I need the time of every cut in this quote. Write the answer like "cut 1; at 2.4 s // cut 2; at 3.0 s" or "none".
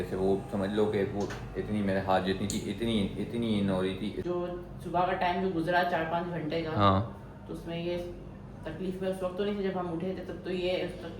cut 1; at 4.2 s